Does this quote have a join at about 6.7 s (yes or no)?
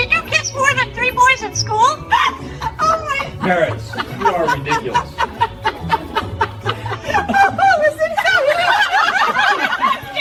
no